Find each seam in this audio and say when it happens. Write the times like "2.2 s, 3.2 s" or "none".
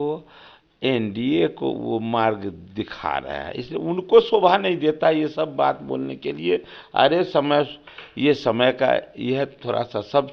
none